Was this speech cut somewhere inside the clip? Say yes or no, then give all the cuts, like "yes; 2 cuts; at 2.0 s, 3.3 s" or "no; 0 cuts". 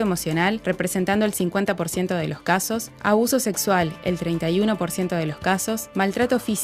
yes; 1 cut; at 2.1 s